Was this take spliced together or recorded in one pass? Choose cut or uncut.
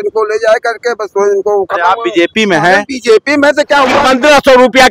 cut